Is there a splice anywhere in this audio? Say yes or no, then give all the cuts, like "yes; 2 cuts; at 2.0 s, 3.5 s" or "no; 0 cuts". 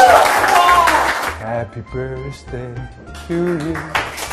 yes; 1 cut; at 1.3 s